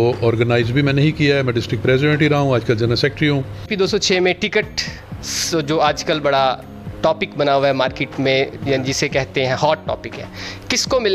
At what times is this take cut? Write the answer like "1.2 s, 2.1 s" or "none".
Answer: 3.7 s